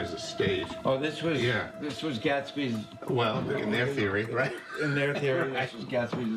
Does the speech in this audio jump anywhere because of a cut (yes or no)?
no